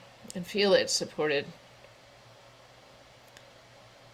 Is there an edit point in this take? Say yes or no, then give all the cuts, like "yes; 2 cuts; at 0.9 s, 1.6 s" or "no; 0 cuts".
no; 0 cuts